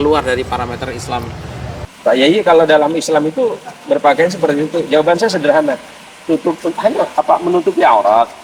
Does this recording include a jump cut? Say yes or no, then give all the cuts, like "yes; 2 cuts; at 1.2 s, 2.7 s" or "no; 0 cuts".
yes; 1 cut; at 1.7 s